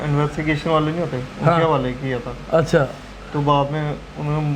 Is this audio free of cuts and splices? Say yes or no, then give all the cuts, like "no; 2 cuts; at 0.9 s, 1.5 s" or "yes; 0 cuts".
yes; 0 cuts